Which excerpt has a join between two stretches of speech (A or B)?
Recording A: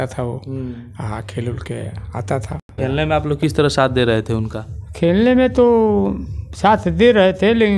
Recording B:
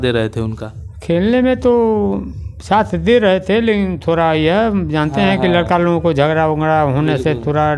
A